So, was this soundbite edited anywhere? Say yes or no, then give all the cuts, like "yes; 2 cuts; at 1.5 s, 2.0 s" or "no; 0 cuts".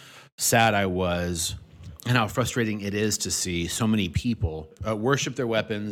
yes; 2 cuts; at 2.3 s, 4.8 s